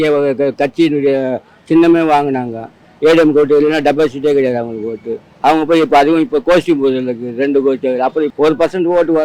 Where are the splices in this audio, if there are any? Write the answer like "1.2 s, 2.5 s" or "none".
8.3 s